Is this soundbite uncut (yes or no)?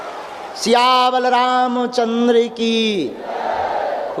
yes